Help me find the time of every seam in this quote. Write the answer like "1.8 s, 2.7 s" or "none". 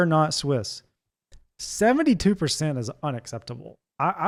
none